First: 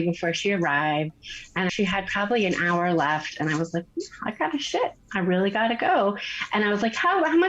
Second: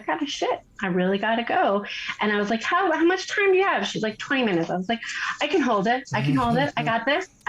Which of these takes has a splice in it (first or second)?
first